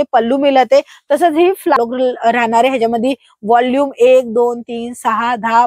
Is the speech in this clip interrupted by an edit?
yes; 1 cut; at 1.8 s

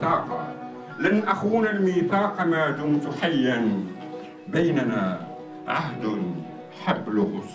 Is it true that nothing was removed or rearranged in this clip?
no; 1 cut; at 3.1 s

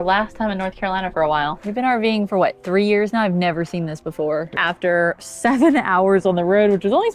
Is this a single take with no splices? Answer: no; 2 cuts; at 1.6 s, 4.5 s

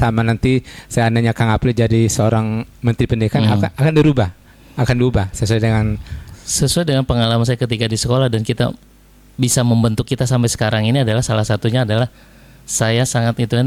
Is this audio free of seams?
yes; 0 cuts

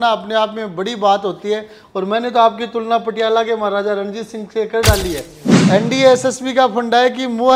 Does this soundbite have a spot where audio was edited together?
yes; 1 cut; at 5.6 s

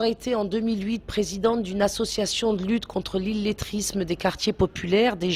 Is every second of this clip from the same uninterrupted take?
yes; 0 cuts

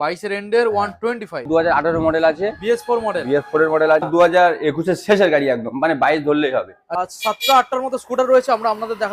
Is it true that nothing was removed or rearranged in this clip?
no; 3 cuts; at 1.5 s, 4.1 s, 6.8 s

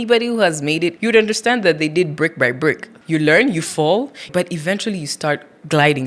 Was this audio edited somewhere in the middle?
yes; 3 cuts; at 1.0 s, 2.9 s, 4.3 s

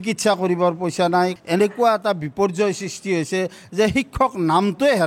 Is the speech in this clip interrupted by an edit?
yes; 1 cut; at 1.4 s

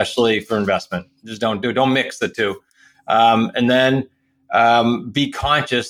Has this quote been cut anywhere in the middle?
no; 0 cuts

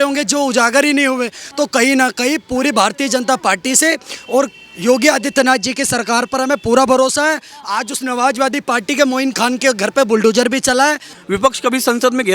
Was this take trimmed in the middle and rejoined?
yes; 1 cut; at 11.1 s

